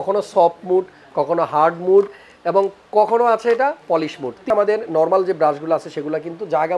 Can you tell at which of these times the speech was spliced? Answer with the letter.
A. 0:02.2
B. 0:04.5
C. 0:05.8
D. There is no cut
B